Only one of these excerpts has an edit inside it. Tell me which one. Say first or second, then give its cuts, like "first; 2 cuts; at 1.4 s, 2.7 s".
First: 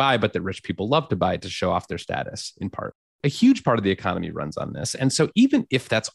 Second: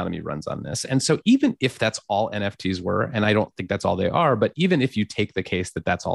first; 1 cut; at 3.2 s